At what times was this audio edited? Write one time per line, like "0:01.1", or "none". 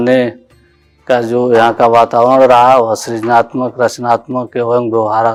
none